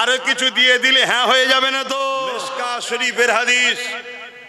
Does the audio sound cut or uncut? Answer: cut